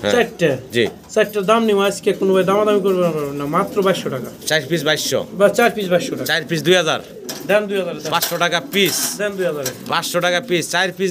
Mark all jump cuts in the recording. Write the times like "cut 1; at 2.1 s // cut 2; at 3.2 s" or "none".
none